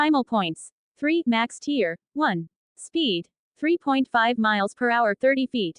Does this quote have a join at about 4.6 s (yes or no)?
no